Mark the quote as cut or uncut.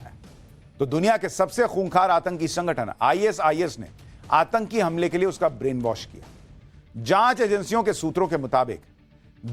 uncut